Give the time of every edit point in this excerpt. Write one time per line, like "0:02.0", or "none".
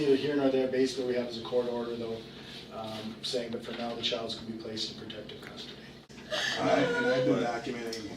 0:06.0